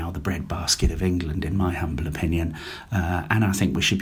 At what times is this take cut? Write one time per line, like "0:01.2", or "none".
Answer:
none